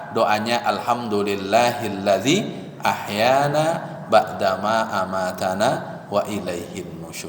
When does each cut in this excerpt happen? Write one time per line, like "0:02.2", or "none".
none